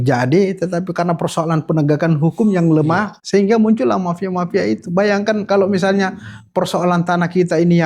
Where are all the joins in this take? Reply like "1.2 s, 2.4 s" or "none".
3.1 s